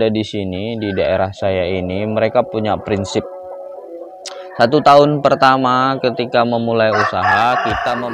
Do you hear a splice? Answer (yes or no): no